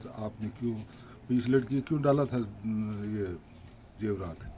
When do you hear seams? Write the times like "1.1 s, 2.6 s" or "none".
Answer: none